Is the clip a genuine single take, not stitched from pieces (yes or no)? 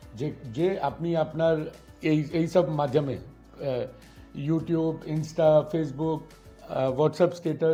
yes